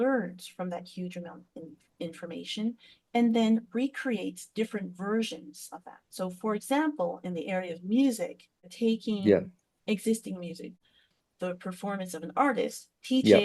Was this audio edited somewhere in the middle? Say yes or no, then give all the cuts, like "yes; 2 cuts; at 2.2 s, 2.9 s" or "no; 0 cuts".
yes; 2 cuts; at 8.7 s, 10.8 s